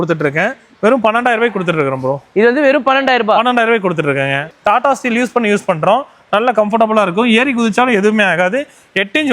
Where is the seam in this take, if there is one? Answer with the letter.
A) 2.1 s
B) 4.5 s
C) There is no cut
B